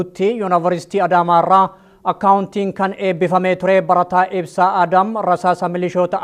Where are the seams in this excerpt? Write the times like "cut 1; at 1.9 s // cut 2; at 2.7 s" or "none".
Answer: none